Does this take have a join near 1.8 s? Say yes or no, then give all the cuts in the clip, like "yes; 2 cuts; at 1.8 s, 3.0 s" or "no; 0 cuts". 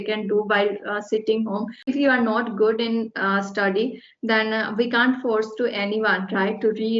yes; 1 cut; at 1.8 s